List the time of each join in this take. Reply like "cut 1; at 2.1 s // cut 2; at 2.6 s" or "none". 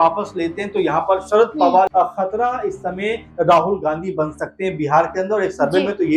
cut 1; at 1.9 s